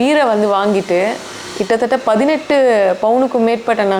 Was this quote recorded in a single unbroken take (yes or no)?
yes